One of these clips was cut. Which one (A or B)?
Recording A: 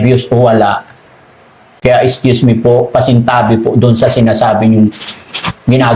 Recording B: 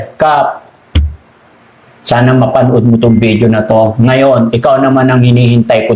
A